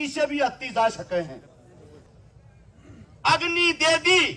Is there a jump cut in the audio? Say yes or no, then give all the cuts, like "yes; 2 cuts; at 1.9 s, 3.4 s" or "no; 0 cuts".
yes; 1 cut; at 2.0 s